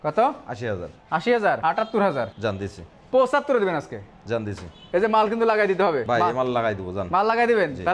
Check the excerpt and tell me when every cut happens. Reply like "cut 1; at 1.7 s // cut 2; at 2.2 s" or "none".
cut 1; at 1.6 s // cut 2; at 4.7 s // cut 3; at 6.0 s